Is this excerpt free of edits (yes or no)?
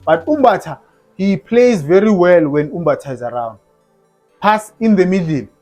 yes